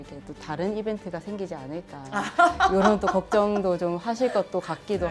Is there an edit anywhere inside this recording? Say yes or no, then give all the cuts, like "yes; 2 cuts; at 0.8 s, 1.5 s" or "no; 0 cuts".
no; 0 cuts